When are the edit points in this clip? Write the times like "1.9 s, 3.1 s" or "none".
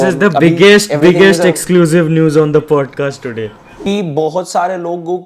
3.6 s